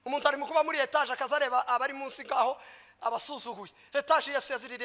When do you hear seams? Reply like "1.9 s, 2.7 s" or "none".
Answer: none

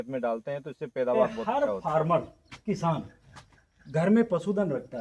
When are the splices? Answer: 1.4 s

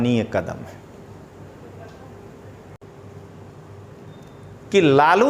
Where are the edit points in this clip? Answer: 2.8 s

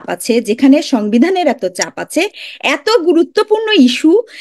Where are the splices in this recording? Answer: none

